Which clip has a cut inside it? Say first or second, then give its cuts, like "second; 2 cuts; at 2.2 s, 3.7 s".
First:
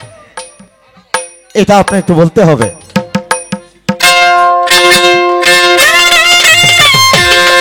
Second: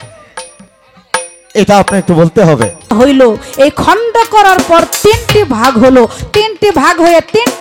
second; 1 cut; at 2.9 s